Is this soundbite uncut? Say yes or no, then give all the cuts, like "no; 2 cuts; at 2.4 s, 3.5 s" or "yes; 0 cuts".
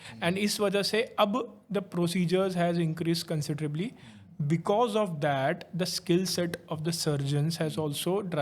yes; 0 cuts